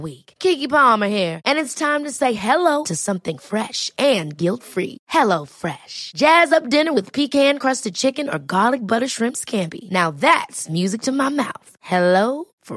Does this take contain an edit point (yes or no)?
no